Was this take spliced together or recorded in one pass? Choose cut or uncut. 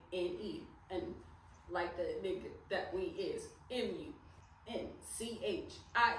uncut